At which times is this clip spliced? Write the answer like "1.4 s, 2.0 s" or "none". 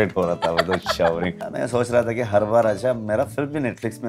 1.4 s